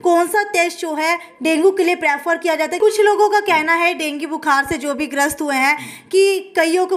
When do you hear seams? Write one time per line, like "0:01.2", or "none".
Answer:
0:02.8